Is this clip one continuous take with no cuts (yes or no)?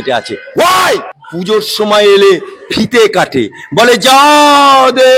no